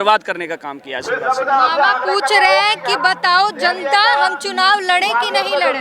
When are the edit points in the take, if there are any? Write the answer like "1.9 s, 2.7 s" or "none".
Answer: none